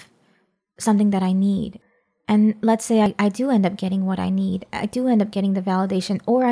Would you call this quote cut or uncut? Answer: cut